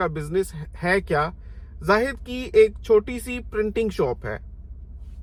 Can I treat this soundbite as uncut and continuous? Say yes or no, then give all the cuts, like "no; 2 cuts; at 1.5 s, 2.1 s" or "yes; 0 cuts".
yes; 0 cuts